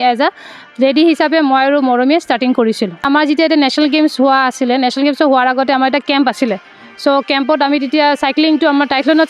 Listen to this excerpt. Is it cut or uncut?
cut